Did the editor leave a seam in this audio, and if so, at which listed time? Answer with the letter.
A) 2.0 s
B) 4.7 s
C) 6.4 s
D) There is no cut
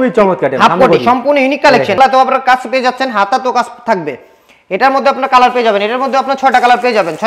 A